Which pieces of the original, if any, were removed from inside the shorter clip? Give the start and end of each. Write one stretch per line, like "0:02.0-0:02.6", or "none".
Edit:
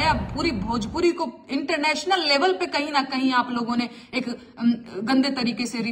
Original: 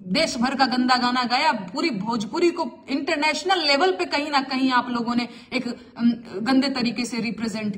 none